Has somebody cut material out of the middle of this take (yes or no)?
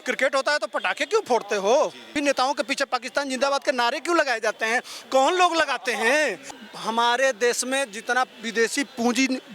yes